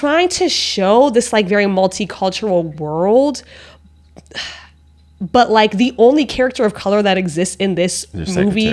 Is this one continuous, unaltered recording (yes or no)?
yes